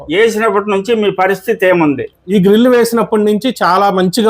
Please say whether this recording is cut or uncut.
cut